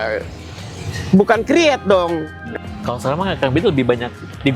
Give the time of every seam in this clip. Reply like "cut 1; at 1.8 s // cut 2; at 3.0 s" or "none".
cut 1; at 2.4 s